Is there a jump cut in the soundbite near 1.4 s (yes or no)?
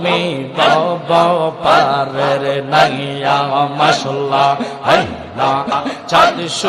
no